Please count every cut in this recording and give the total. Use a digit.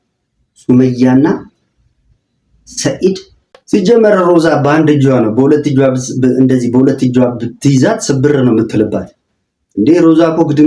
1